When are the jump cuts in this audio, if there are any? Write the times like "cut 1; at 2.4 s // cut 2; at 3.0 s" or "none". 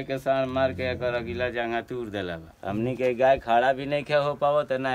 cut 1; at 2.4 s